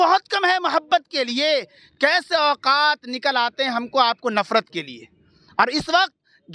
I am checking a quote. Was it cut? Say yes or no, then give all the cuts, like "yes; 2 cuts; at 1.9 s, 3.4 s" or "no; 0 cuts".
no; 0 cuts